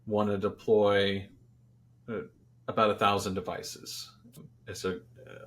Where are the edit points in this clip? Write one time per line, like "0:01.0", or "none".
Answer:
0:04.5